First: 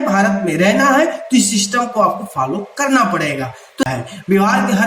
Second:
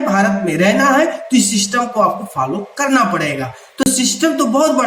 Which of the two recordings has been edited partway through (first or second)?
first